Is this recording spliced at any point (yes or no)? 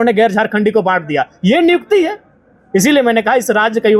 no